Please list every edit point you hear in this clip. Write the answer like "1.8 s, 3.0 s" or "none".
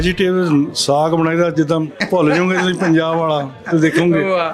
2.0 s